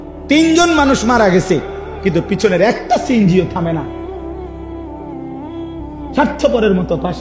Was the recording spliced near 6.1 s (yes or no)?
yes